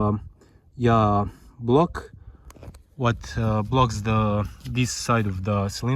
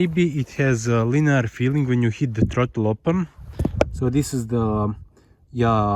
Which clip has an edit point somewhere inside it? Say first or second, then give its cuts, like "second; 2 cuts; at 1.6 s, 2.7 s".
second; 1 cut; at 3.4 s